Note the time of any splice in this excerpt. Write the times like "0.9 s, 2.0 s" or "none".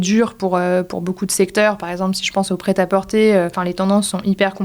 3.5 s